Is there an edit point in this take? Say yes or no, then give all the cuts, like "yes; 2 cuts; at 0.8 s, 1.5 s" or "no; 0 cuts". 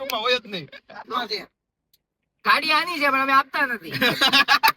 yes; 1 cut; at 1.1 s